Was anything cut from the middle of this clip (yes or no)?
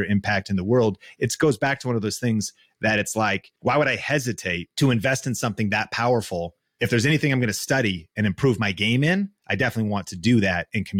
yes